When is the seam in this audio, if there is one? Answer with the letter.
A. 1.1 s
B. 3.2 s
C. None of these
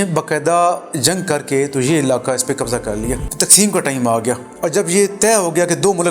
B